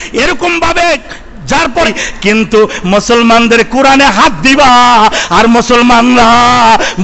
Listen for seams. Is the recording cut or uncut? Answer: cut